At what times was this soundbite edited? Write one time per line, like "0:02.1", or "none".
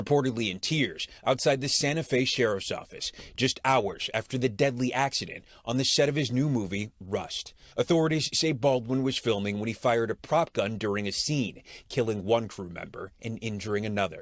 0:07.7